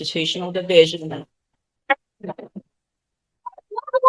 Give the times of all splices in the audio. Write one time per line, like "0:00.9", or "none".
none